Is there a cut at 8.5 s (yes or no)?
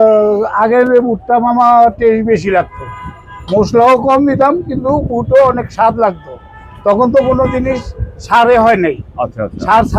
no